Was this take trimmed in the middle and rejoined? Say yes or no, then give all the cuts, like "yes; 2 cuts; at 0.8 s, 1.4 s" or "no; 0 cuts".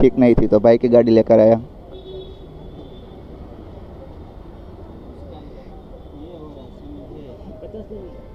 no; 0 cuts